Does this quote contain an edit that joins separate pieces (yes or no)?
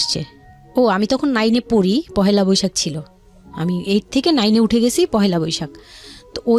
no